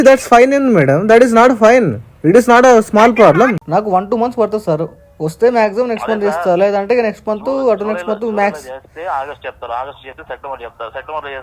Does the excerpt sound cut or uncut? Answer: cut